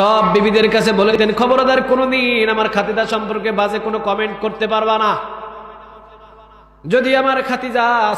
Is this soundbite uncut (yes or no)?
no